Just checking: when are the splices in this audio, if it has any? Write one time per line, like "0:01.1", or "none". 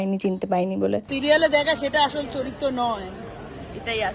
0:01.1